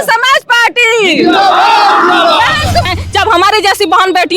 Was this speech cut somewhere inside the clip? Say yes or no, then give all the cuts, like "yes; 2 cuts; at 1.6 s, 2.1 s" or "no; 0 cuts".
yes; 1 cut; at 2.9 s